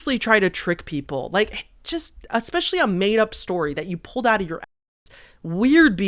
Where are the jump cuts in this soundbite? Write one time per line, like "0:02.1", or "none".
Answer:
none